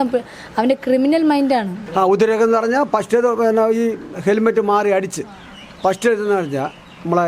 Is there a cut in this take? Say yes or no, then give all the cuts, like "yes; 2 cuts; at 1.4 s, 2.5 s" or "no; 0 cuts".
yes; 1 cut; at 1.8 s